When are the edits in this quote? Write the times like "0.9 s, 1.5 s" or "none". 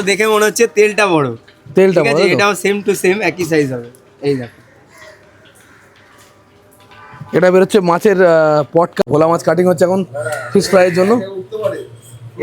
9.0 s